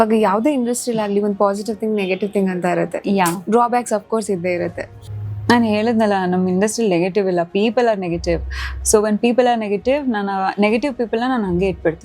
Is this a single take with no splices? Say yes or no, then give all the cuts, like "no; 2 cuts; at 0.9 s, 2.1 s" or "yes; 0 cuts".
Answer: no; 1 cut; at 4.9 s